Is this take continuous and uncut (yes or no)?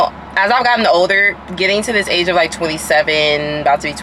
yes